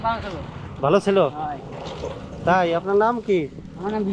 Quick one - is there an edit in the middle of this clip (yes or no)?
no